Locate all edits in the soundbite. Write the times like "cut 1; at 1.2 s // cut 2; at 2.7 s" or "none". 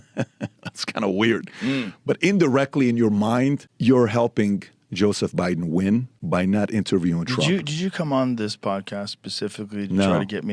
cut 1; at 1.9 s // cut 2; at 3.7 s // cut 3; at 6.1 s